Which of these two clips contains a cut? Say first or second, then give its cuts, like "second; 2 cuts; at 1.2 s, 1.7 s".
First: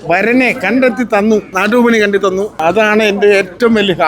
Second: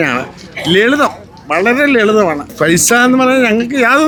first; 2 cuts; at 1.5 s, 2.5 s